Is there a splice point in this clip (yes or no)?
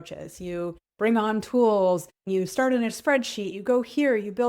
yes